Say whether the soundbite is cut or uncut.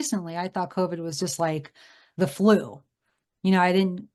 uncut